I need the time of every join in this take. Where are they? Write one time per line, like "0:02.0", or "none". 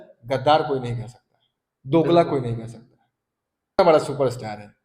0:03.8